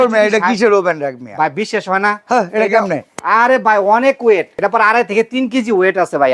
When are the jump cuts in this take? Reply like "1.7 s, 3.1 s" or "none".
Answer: 4.5 s